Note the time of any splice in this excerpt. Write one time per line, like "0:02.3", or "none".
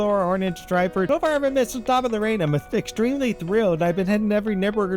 0:01.1